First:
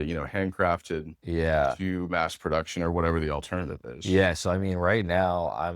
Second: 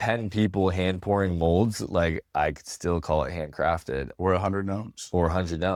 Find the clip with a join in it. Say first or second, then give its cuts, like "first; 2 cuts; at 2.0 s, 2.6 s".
first; 1 cut; at 1.1 s